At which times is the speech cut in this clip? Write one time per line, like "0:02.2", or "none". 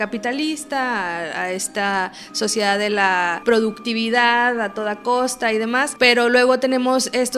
0:03.4
0:05.9